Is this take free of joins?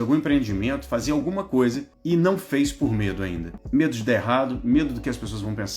no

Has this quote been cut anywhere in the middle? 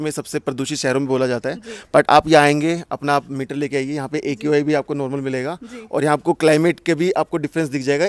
no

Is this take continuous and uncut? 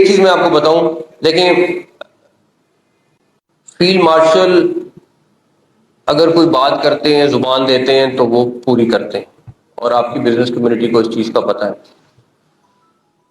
yes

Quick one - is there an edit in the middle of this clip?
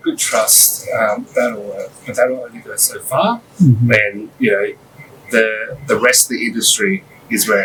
no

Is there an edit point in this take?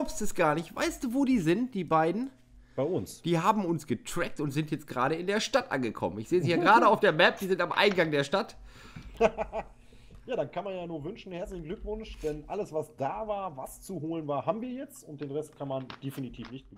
no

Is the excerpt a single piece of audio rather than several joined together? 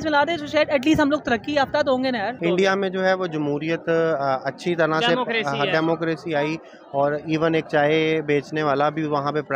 no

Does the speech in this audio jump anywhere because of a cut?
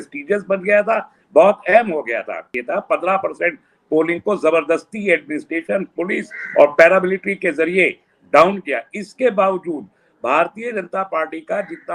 yes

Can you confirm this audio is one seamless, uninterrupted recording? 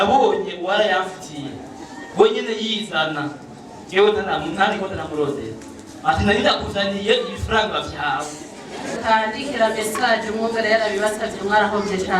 no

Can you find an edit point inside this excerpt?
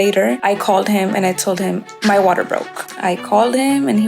yes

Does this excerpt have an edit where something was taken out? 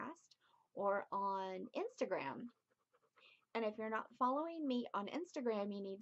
yes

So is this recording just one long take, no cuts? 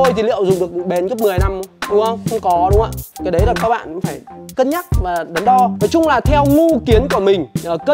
no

